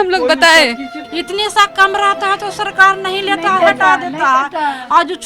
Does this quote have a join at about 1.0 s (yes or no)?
yes